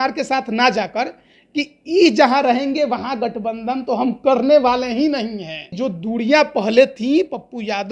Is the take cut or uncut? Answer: cut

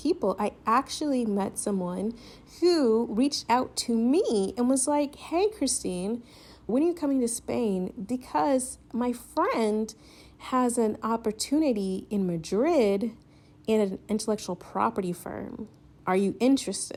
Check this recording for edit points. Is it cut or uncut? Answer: uncut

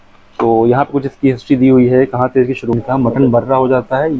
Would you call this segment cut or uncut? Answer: cut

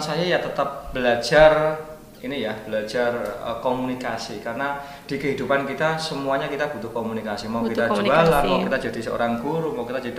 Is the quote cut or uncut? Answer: uncut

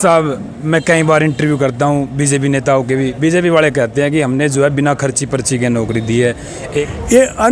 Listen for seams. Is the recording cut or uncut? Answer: cut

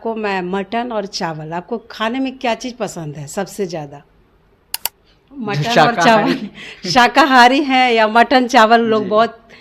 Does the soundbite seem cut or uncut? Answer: uncut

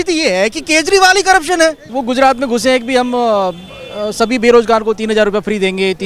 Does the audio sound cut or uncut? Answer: cut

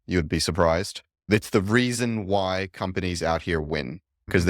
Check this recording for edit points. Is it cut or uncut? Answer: cut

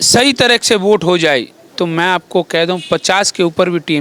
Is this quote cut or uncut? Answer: uncut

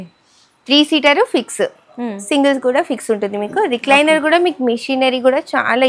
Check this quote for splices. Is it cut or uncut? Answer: uncut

